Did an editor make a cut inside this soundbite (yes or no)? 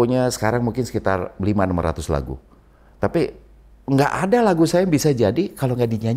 no